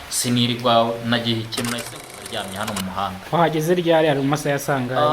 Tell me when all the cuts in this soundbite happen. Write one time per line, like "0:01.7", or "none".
0:01.8